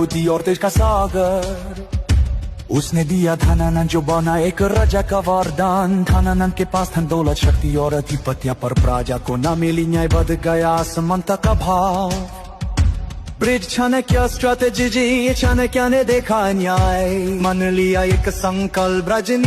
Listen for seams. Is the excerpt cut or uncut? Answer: cut